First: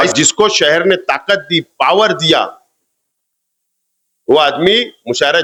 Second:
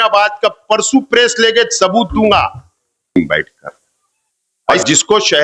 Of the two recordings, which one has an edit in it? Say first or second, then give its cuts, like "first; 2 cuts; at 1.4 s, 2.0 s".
second; 1 cut; at 3.2 s